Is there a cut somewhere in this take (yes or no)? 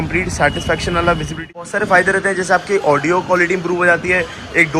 yes